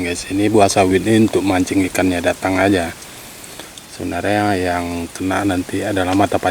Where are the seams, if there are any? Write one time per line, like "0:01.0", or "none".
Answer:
none